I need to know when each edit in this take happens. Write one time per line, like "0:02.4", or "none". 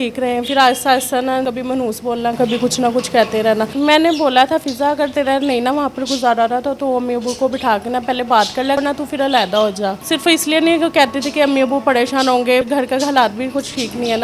0:01.5
0:03.7
0:08.8
0:10.0
0:12.7